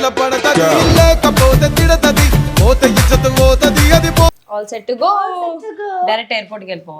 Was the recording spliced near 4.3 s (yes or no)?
yes